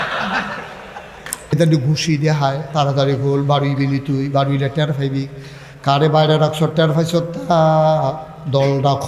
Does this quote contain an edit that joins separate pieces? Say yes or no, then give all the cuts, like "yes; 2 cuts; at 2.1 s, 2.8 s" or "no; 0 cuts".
yes; 1 cut; at 1.5 s